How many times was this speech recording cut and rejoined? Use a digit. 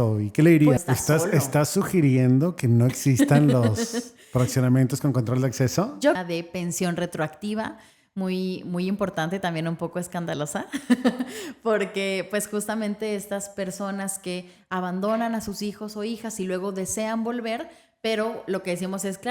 2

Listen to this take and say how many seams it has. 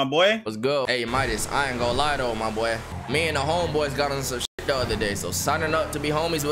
2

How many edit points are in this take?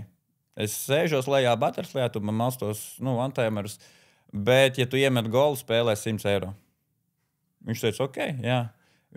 0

